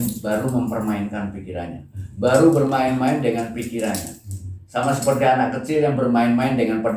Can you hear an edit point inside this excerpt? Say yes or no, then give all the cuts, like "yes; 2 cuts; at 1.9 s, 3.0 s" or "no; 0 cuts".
no; 0 cuts